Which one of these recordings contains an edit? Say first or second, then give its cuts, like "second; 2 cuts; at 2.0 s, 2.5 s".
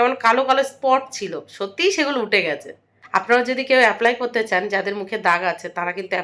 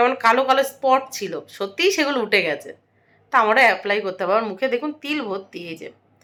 first; 1 cut; at 3.2 s